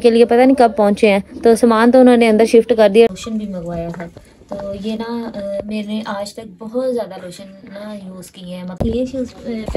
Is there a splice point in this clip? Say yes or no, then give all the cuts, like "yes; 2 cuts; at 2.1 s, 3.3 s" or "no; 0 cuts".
yes; 2 cuts; at 3.1 s, 8.8 s